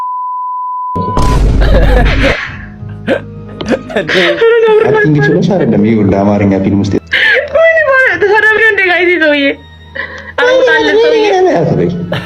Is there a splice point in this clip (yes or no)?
no